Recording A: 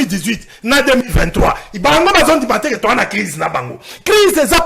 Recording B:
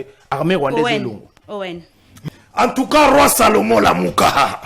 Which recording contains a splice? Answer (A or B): B